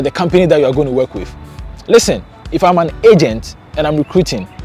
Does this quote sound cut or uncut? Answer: uncut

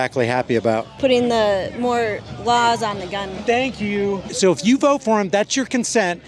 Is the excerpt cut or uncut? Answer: cut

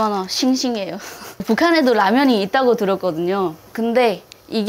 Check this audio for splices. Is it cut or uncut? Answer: cut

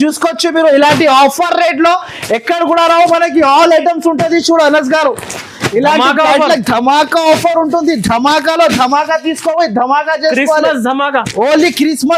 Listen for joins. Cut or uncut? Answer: uncut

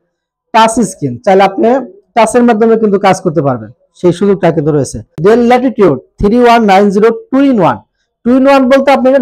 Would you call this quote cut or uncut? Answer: cut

